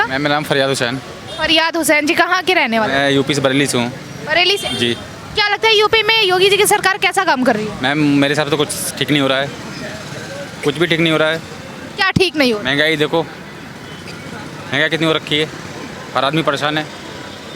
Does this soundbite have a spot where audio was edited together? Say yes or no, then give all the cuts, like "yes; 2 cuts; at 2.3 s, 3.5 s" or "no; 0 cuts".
no; 0 cuts